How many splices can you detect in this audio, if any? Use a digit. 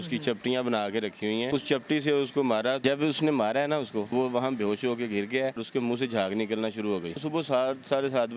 5